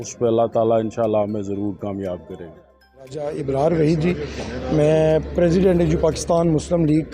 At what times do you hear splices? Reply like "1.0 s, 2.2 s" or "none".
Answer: 3.2 s